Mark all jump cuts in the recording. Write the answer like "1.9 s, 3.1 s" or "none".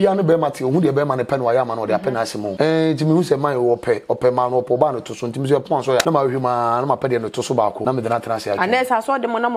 2.5 s, 6.0 s, 7.8 s